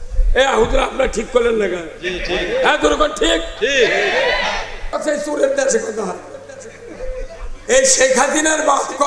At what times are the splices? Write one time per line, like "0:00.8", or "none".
0:05.0